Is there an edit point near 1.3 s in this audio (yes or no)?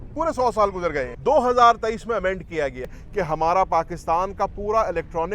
no